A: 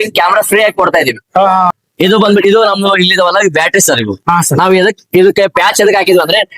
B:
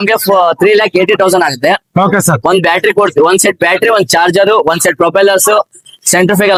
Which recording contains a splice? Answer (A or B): A